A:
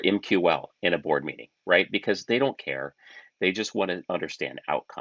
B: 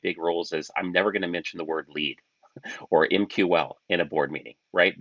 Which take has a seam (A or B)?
A